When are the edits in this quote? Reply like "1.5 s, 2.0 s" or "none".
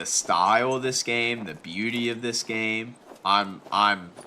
3.0 s